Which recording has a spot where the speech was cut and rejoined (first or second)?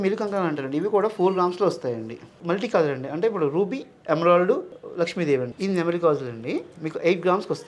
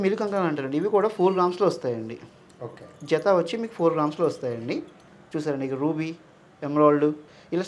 first